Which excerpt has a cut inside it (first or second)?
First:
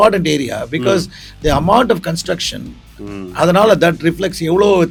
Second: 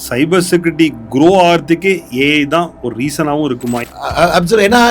second